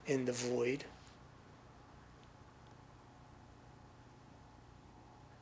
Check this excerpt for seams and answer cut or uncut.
uncut